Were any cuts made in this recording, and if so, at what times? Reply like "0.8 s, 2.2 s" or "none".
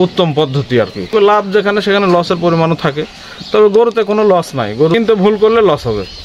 1.1 s, 4.9 s